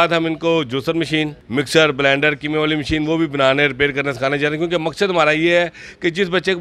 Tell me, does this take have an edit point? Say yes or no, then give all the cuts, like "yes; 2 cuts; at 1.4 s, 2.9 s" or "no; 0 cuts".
yes; 1 cut; at 1.4 s